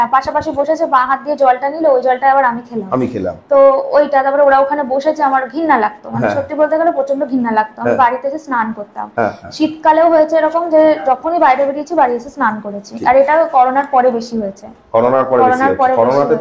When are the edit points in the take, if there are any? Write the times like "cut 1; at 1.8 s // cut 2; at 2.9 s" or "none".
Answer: none